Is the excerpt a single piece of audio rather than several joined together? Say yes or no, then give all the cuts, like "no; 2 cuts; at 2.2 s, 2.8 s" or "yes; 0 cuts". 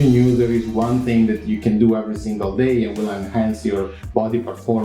yes; 0 cuts